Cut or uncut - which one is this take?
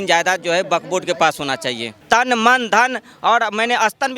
cut